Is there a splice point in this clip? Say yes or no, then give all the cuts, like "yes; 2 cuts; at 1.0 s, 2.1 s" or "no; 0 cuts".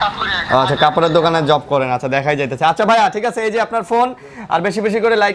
no; 0 cuts